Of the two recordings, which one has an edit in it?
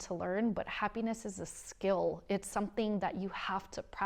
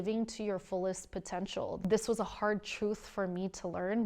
second; 1 cut; at 1.8 s

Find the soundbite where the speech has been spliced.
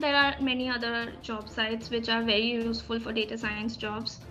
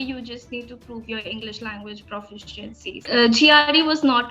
second; 1 cut; at 3.0 s

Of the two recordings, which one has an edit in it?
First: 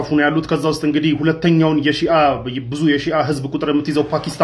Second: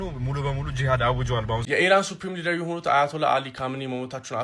second; 1 cut; at 1.7 s

